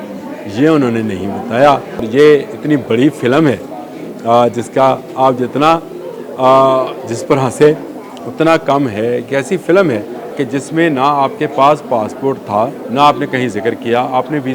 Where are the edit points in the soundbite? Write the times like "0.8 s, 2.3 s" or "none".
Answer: 2.1 s, 10.4 s, 12.8 s